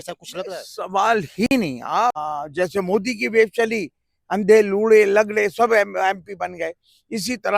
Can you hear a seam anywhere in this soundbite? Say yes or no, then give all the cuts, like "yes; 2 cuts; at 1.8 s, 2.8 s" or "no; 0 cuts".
yes; 1 cut; at 2.2 s